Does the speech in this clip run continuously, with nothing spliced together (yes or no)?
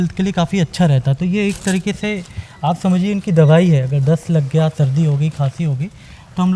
yes